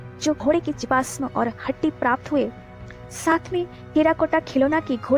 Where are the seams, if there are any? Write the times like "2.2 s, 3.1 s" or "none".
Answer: none